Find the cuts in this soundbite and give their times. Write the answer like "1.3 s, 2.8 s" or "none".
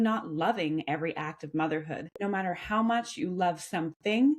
2.1 s